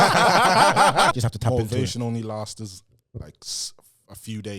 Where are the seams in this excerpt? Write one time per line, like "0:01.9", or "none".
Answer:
0:01.1